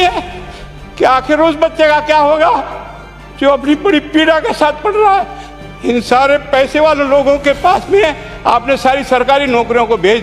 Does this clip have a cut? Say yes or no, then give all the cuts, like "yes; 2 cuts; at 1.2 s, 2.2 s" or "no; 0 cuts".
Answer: no; 0 cuts